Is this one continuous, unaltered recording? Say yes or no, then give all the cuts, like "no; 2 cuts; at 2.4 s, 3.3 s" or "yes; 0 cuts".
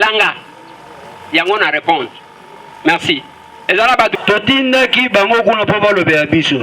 no; 1 cut; at 4.2 s